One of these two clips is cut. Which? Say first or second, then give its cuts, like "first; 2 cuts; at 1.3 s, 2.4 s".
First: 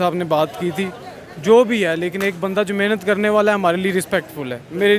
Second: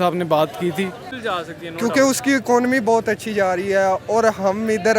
second; 1 cut; at 1.2 s